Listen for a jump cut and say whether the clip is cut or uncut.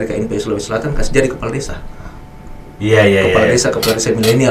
uncut